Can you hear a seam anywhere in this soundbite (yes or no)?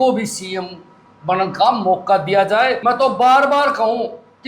yes